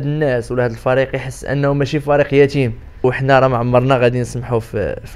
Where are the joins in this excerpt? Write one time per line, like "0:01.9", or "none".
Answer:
0:03.0